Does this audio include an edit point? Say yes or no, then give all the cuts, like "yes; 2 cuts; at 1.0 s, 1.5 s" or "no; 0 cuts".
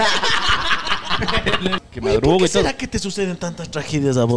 yes; 1 cut; at 1.8 s